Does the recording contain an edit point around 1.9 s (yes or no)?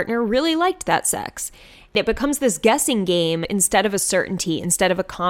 yes